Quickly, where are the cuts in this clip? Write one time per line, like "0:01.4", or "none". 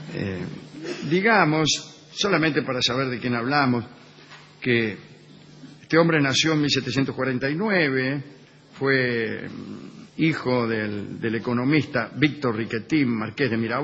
0:11.1